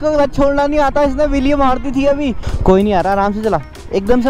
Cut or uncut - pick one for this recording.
cut